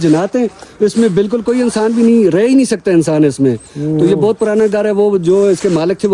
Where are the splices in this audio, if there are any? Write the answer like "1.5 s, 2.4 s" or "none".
none